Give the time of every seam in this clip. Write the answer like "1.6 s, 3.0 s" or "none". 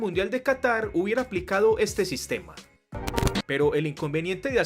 2.8 s